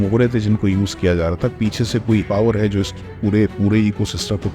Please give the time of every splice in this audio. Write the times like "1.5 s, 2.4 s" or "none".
2.3 s